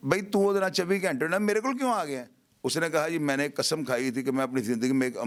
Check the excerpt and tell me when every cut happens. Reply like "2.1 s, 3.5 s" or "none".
none